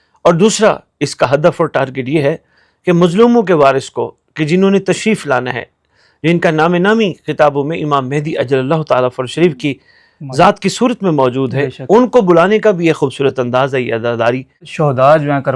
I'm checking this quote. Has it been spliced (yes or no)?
yes